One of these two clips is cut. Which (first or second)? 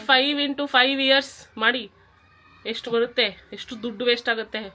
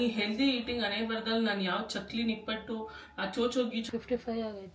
second